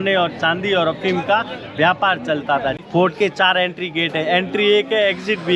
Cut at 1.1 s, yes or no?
no